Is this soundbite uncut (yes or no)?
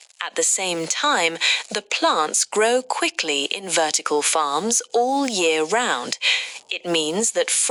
yes